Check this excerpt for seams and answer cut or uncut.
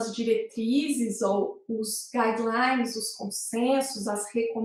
uncut